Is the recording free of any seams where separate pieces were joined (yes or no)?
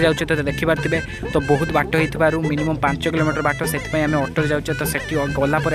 yes